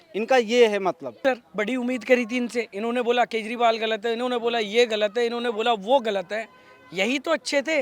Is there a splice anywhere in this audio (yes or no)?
yes